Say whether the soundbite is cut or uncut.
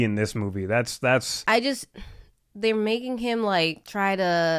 cut